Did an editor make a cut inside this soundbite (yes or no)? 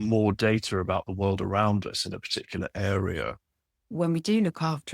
yes